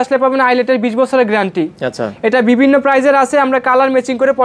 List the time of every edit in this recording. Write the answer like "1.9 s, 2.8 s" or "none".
none